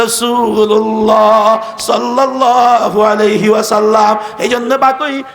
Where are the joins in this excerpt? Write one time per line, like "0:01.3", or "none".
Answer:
0:02.3